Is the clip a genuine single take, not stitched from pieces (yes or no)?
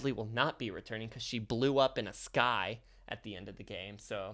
yes